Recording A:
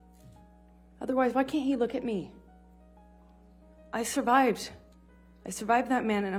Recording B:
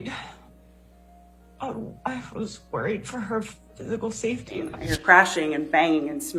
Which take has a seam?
B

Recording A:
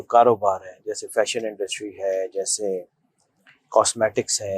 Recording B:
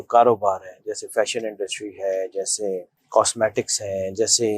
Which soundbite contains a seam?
B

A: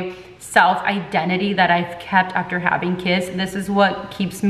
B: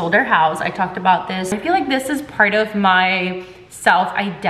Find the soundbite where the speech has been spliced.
B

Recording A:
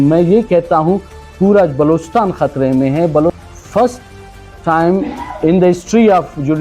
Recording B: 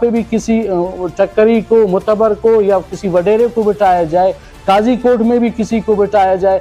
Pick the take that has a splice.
A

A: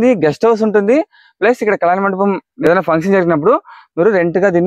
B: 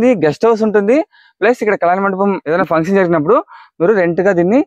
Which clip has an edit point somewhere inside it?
B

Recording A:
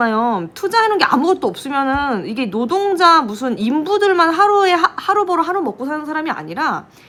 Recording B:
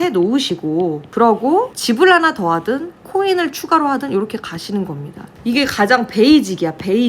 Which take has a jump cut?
B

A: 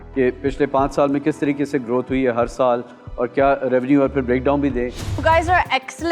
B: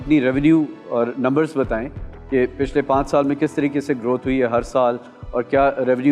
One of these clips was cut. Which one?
A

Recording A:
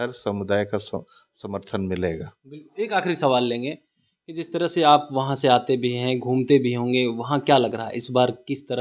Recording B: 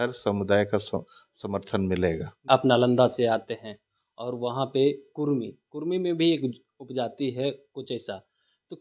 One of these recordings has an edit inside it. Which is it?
B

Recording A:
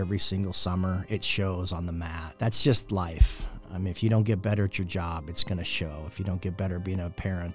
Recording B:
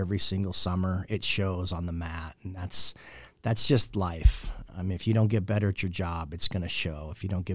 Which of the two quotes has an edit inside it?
A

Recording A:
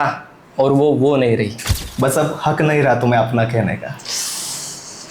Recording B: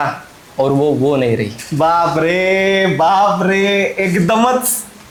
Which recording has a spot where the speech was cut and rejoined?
A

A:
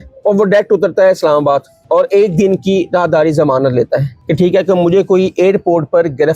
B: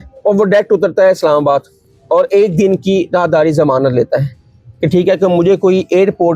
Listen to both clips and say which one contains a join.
A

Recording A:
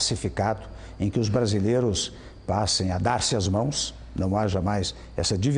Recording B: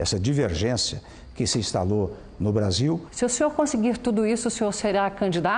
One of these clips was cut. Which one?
B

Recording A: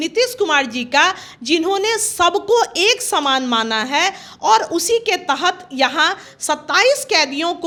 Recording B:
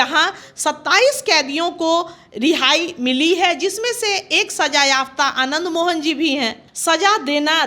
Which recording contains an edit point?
B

